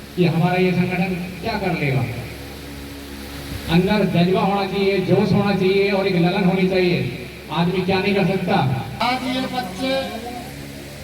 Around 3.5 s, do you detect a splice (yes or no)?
no